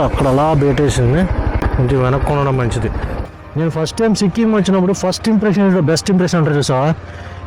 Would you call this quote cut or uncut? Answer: cut